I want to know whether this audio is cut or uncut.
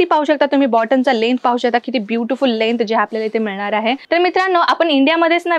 cut